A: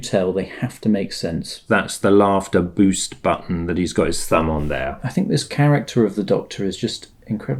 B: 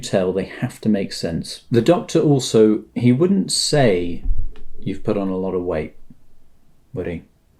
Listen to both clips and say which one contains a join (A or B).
A